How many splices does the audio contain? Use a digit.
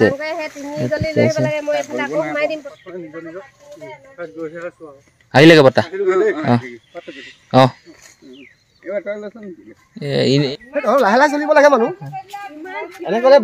2